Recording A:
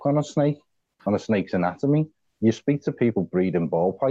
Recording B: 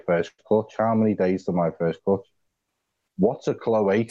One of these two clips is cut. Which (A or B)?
A